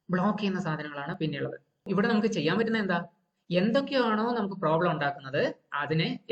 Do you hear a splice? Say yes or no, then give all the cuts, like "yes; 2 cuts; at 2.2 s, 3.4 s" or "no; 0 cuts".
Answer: yes; 1 cut; at 1.8 s